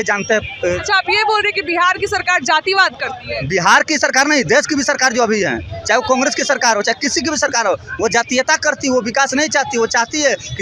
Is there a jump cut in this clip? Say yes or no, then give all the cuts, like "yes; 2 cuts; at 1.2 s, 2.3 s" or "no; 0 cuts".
no; 0 cuts